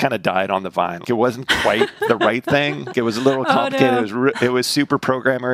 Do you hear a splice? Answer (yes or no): yes